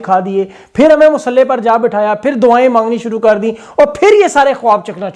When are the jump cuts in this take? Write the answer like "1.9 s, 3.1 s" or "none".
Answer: none